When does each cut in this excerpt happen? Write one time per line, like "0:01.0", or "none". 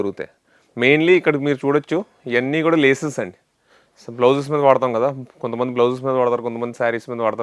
none